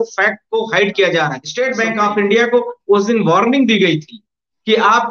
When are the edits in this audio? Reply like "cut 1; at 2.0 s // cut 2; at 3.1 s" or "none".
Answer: cut 1; at 1.4 s